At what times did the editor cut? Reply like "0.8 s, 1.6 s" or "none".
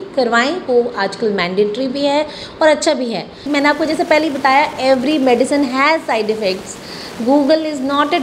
3.4 s

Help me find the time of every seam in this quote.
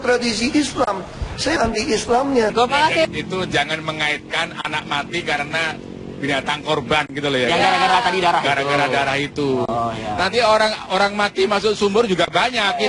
1.6 s, 2.5 s

